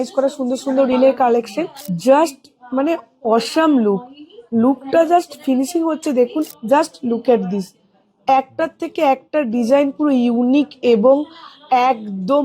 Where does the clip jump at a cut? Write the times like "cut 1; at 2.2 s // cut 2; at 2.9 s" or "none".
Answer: cut 1; at 1.8 s // cut 2; at 6.4 s